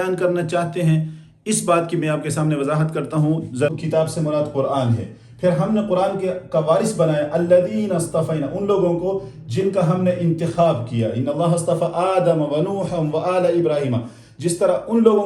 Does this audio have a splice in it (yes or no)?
yes